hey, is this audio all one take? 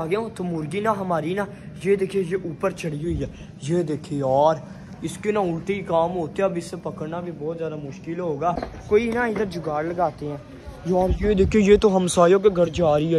no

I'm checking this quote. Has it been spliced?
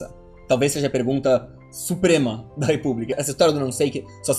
yes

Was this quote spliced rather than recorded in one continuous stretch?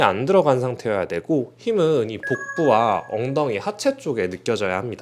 no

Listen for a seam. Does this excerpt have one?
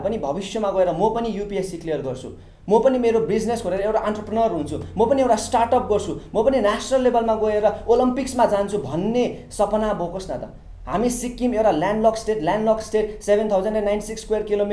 no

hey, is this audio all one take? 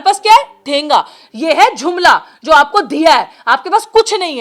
yes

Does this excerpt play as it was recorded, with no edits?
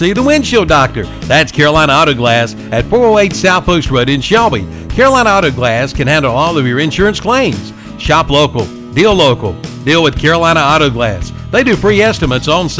yes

